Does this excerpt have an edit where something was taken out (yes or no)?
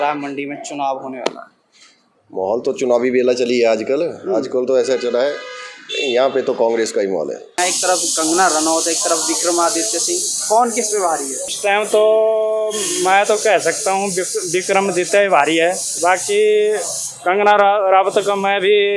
yes